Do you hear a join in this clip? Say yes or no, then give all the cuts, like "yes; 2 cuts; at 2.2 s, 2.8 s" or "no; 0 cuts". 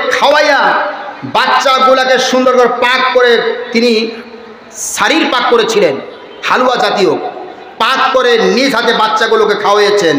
no; 0 cuts